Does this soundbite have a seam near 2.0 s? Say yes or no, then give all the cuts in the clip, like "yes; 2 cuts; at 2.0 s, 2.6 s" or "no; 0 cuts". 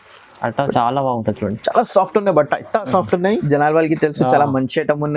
no; 1 cut; at 3.4 s